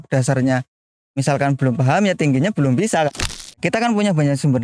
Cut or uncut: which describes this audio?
cut